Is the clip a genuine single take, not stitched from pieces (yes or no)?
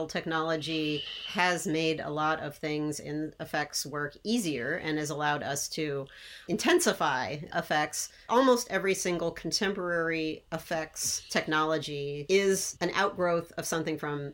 no